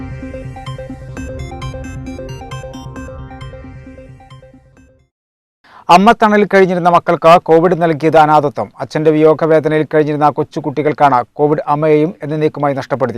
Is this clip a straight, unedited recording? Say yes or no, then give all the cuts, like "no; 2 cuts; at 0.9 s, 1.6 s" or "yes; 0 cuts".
yes; 0 cuts